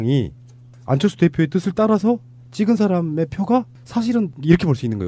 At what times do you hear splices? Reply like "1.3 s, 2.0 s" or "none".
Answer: 1.9 s